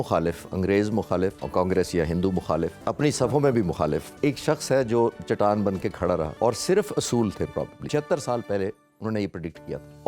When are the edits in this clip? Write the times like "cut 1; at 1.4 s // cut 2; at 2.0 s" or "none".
cut 1; at 1.4 s // cut 2; at 2.8 s // cut 3; at 4.2 s // cut 4; at 6.3 s // cut 5; at 7.8 s